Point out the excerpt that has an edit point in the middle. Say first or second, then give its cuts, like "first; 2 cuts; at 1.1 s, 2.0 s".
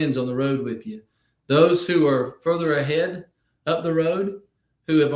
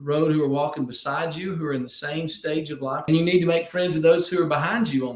second; 1 cut; at 3.1 s